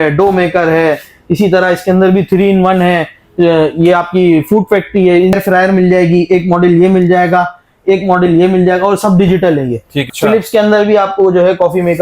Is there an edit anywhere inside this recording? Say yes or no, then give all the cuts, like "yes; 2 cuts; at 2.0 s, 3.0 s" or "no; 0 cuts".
yes; 2 cuts; at 5.3 s, 10.0 s